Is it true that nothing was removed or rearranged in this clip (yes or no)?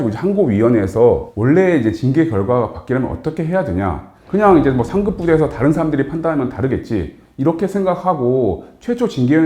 no